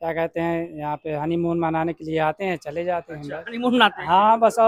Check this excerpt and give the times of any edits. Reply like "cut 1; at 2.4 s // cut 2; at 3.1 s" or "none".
none